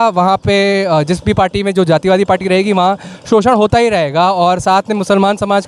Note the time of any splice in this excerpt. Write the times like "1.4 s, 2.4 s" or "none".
none